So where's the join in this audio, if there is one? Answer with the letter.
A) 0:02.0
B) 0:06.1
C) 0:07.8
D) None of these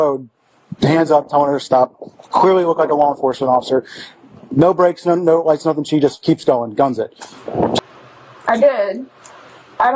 C